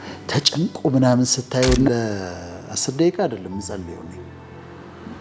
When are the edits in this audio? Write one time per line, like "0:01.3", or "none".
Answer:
0:01.9